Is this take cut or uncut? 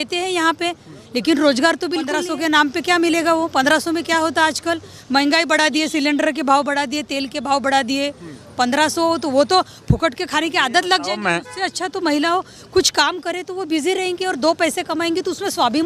cut